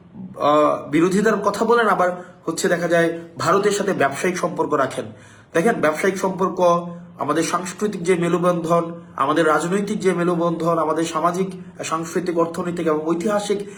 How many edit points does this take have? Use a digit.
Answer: 0